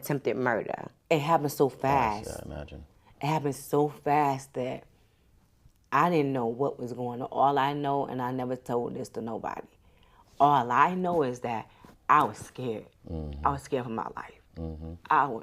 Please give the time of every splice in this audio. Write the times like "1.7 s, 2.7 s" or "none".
0.9 s